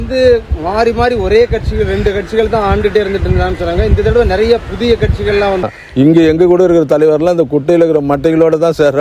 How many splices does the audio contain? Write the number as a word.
one